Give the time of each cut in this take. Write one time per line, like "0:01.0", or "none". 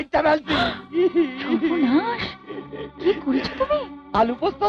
none